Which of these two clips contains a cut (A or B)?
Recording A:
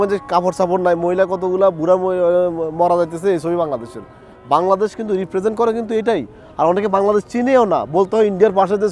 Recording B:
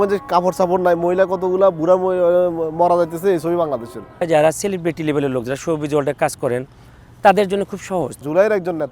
B